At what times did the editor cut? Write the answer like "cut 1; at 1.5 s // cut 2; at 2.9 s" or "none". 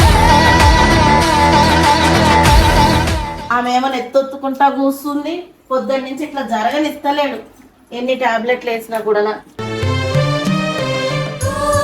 cut 1; at 3.4 s